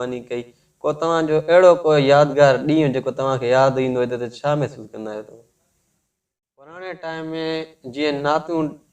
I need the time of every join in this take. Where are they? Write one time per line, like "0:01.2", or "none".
0:06.8